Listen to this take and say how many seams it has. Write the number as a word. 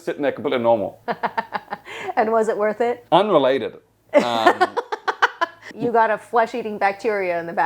three